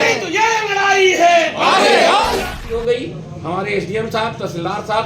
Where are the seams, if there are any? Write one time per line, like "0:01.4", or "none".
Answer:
0:02.4